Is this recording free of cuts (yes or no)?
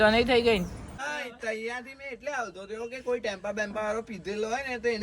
no